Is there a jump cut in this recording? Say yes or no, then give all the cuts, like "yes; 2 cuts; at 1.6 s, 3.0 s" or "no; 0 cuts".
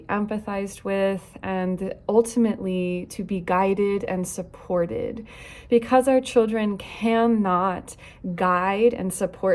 no; 0 cuts